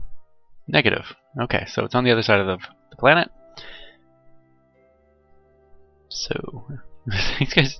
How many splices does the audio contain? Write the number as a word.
one